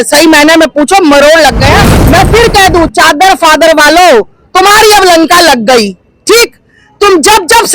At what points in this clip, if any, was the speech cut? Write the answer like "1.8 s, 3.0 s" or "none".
1.9 s